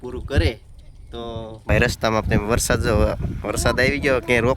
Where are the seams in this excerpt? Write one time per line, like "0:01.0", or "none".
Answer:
0:01.7